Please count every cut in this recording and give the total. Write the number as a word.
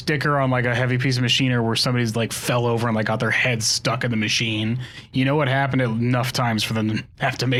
zero